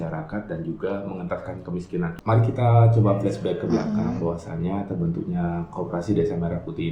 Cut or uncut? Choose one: cut